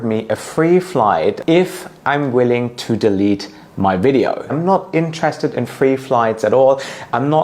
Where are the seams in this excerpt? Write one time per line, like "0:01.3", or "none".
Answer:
0:01.4
0:04.6

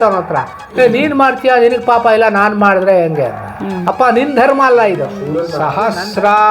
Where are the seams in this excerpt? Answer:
0:05.5

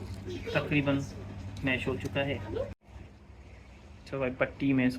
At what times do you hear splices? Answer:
0:02.8

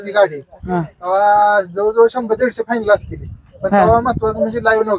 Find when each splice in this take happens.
none

